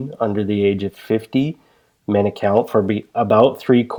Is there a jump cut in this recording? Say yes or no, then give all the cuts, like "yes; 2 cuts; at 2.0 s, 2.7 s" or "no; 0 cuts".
no; 0 cuts